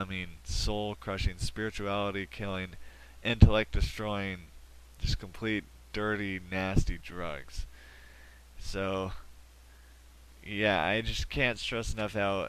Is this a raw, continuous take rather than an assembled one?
yes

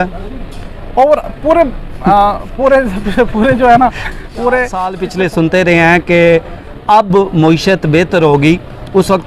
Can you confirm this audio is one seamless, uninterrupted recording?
no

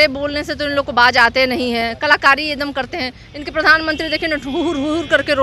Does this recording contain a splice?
no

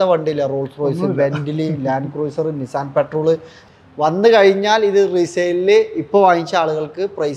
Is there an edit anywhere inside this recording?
yes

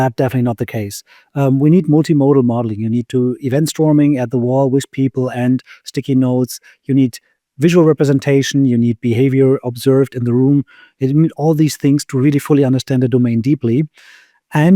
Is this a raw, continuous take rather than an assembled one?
yes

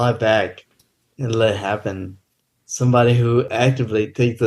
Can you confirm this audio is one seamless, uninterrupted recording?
no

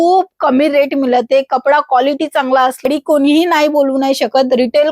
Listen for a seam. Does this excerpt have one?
yes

